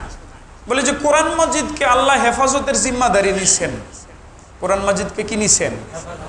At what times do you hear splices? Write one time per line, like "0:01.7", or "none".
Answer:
none